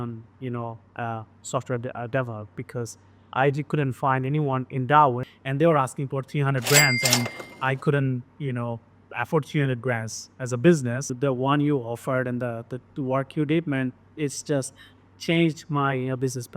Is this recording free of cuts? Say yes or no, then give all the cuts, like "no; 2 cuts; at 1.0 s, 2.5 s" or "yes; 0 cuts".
no; 2 cuts; at 5.3 s, 11.1 s